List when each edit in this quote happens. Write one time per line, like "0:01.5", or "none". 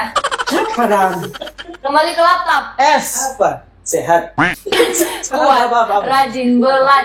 none